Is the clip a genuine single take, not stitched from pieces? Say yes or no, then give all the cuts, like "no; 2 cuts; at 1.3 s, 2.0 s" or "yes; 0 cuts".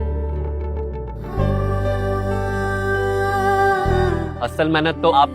no; 1 cut; at 4.1 s